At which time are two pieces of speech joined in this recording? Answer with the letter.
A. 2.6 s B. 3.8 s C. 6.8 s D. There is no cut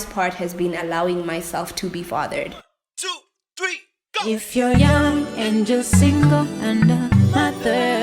A